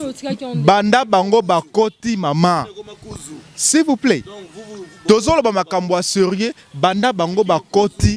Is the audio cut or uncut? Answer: uncut